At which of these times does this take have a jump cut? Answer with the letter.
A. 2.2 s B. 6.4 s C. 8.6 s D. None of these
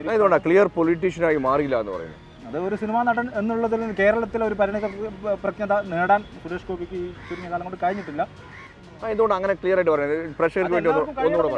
D